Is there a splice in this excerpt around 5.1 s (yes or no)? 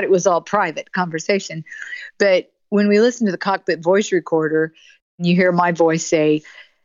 yes